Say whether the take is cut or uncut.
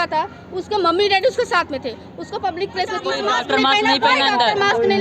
cut